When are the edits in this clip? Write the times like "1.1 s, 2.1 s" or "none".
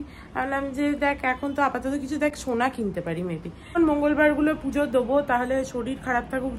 3.8 s